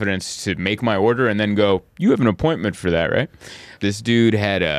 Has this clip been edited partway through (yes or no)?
yes